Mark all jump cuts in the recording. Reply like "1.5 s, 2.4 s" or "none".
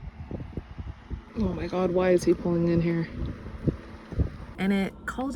1.2 s, 4.4 s